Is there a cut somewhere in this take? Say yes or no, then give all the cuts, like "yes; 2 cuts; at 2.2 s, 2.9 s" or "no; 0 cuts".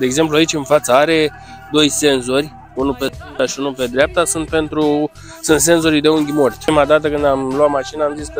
no; 0 cuts